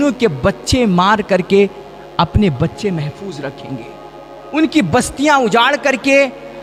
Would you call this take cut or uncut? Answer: uncut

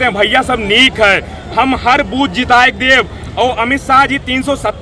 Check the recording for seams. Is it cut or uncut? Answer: uncut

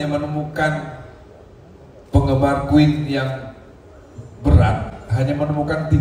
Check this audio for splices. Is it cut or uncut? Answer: uncut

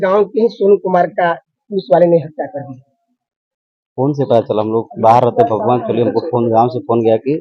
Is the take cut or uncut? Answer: uncut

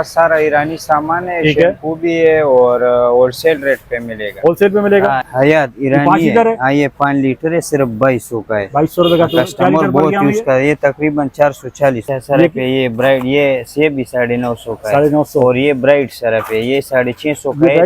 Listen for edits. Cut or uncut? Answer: cut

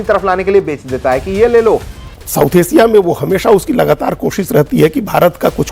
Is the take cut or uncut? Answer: cut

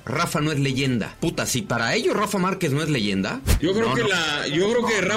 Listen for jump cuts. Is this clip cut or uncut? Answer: cut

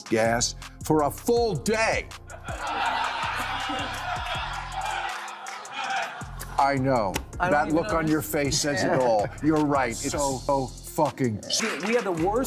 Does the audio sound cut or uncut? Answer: cut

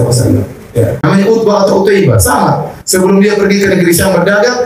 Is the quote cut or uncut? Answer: cut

